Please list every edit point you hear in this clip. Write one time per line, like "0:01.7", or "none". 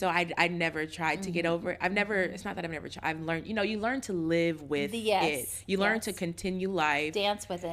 none